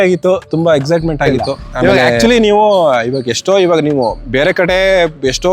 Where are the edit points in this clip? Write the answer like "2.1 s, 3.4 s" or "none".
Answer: 2.2 s